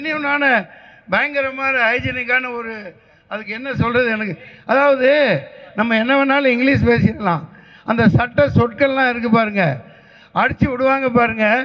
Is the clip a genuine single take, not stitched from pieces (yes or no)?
yes